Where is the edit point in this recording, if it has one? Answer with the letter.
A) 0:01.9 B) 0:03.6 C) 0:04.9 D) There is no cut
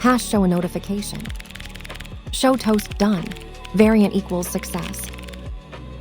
C